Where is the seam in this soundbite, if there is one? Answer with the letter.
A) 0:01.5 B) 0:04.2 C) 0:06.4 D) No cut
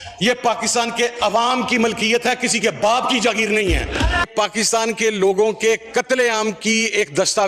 B